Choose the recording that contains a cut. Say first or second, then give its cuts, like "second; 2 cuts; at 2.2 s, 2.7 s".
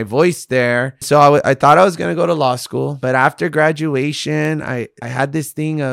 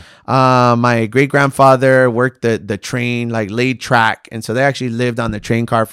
first; 3 cuts; at 1.0 s, 3.0 s, 5.0 s